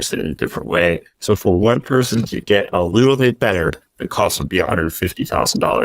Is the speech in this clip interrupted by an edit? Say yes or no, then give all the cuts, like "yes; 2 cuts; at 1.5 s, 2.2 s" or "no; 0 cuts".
yes; 1 cut; at 1.1 s